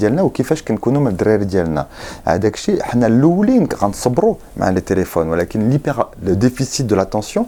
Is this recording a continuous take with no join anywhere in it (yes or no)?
yes